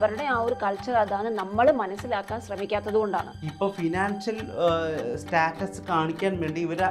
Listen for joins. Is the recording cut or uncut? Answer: cut